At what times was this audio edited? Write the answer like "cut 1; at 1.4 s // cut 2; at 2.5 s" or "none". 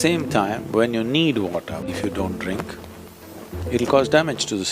cut 1; at 1.9 s